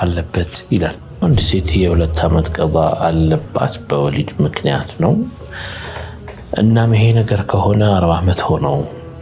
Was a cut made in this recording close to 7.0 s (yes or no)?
no